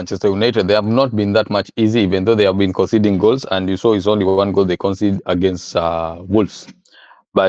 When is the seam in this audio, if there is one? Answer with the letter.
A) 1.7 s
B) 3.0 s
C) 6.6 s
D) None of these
D